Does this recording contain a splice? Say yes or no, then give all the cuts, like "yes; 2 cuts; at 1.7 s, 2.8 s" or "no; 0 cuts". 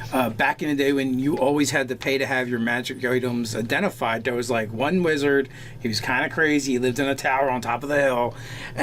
yes; 1 cut; at 3.7 s